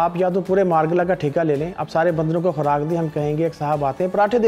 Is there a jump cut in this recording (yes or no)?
no